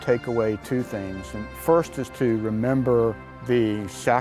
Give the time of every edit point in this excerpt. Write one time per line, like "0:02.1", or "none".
0:03.3